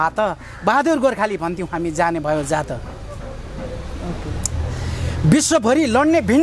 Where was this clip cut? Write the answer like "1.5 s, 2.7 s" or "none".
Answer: none